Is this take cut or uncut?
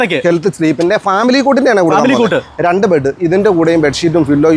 uncut